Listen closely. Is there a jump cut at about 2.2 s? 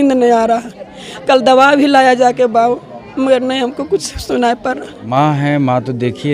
no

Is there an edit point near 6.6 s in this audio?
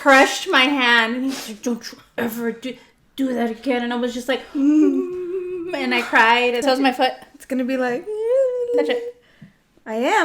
yes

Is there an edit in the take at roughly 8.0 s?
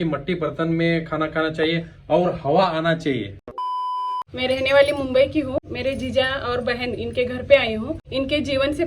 yes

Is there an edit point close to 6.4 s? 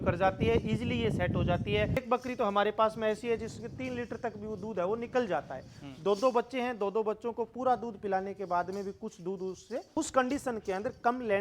no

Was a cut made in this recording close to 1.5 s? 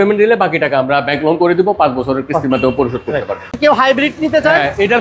no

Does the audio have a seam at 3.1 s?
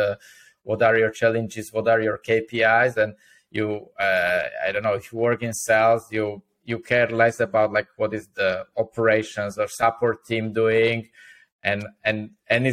no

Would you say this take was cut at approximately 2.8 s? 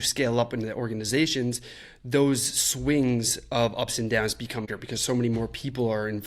no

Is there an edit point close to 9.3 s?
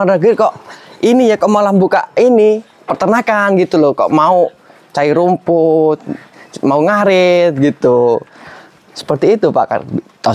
no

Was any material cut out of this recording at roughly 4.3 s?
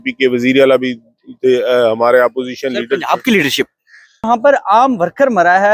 yes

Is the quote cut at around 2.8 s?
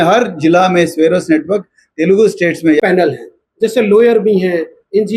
yes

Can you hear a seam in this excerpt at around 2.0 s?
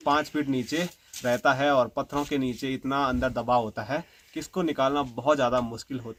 no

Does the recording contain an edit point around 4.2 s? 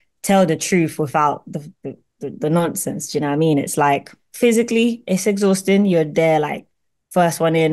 yes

